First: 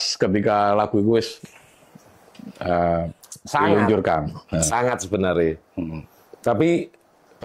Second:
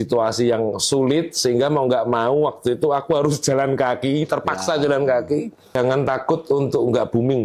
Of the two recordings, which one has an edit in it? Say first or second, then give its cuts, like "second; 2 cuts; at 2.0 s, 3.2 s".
second; 1 cut; at 5.8 s